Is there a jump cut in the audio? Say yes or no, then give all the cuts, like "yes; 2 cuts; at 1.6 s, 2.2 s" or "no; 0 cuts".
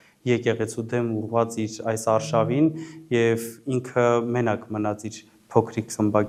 no; 0 cuts